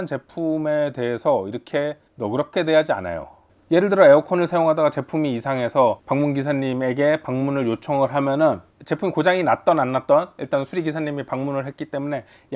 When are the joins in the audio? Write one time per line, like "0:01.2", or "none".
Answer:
none